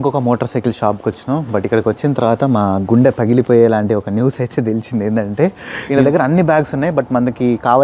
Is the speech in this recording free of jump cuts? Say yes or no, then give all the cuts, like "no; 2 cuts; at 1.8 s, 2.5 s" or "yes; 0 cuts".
yes; 0 cuts